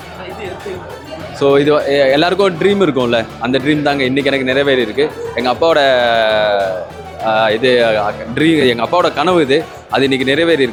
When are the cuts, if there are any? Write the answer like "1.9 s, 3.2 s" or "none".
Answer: none